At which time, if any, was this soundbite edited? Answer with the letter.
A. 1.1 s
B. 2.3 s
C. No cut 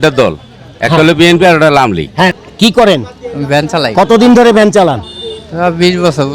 B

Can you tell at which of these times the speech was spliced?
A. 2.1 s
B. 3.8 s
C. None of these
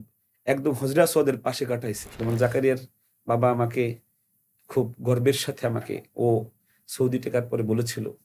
A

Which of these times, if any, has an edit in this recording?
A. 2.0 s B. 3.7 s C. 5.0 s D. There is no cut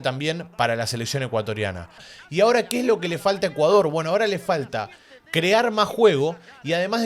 A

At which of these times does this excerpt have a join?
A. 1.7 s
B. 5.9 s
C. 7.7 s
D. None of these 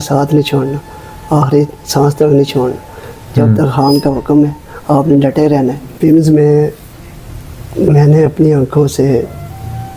B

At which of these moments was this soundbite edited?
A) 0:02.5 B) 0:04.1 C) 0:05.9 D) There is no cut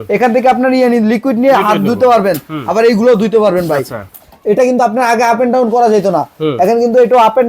B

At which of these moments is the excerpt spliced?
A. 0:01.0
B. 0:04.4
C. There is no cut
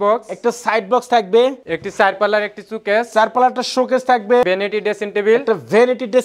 B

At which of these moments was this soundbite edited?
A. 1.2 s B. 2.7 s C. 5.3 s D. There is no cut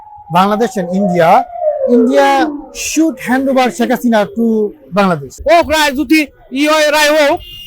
C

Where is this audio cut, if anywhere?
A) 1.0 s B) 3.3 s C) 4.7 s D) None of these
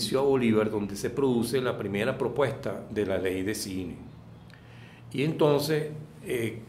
D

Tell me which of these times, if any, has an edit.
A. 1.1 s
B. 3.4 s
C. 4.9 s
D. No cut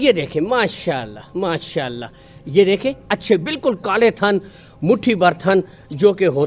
D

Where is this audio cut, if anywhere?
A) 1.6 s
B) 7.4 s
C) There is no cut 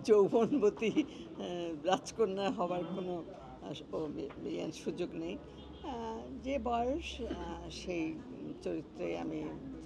C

